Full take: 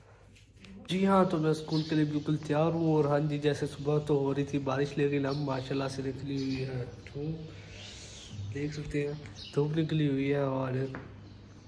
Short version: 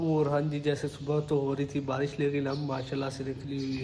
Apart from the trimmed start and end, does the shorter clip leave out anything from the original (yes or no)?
no